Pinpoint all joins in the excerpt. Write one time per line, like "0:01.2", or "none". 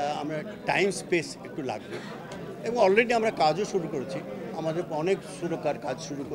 none